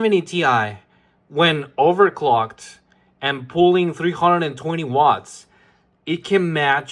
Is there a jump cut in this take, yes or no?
no